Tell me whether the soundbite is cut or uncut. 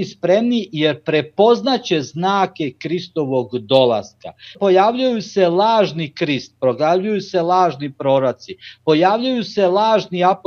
cut